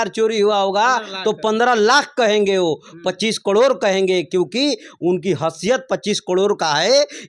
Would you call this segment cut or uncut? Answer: uncut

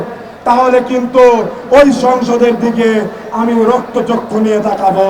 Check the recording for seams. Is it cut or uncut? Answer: uncut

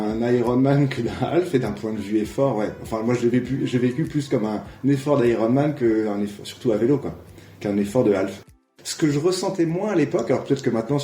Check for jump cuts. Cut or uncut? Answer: cut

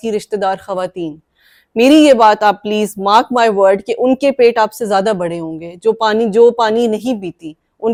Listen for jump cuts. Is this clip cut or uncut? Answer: uncut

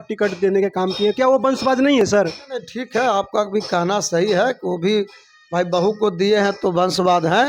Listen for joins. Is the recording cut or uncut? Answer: uncut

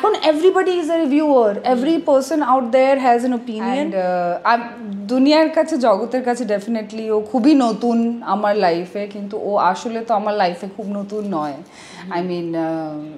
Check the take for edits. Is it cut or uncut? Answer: cut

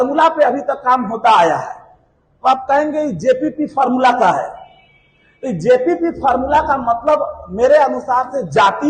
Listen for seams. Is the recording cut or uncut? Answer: uncut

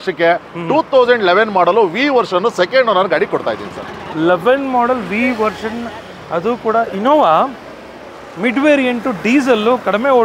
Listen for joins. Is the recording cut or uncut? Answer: uncut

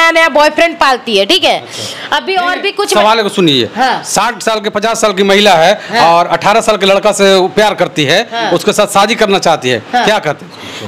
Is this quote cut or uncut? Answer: uncut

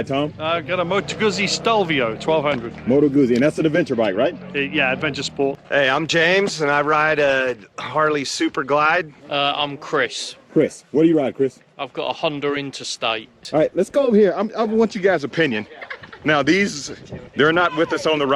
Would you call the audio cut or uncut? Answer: cut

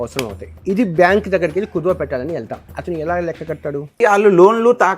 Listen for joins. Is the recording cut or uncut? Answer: cut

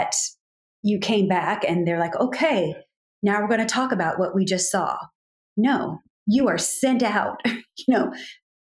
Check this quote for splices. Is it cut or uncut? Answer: uncut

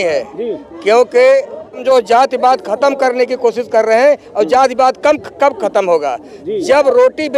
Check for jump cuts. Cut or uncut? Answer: cut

